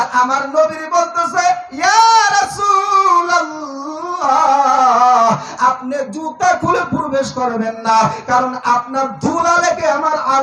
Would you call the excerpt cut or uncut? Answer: uncut